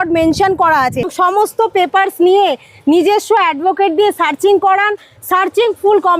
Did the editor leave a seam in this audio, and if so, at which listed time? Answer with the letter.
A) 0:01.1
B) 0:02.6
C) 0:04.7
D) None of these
A